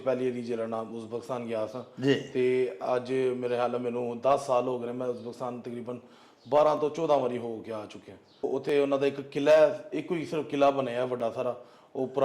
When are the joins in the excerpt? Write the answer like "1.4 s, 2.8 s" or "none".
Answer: 8.5 s